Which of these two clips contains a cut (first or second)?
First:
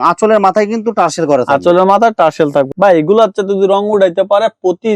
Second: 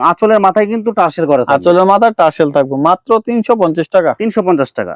first